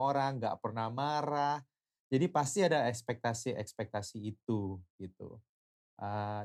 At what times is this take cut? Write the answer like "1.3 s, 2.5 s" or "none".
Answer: none